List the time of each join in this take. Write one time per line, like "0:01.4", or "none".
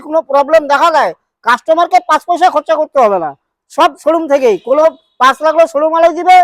none